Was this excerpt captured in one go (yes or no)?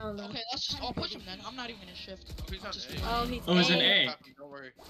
yes